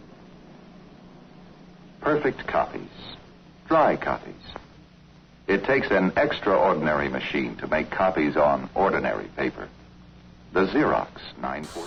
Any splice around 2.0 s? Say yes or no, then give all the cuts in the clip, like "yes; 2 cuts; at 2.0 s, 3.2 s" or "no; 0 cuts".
no; 0 cuts